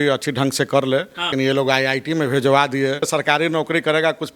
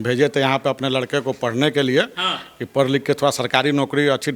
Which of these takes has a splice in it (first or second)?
first